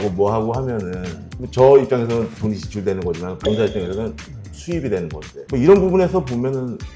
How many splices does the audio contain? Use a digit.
1